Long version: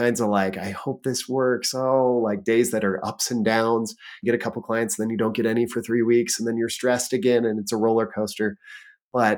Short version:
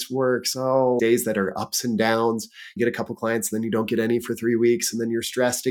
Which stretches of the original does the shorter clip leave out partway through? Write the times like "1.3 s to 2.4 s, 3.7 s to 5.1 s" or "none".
2.2 s to 2.5 s